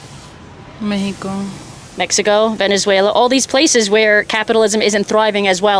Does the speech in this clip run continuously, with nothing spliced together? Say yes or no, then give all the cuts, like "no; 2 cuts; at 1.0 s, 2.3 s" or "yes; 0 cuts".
yes; 0 cuts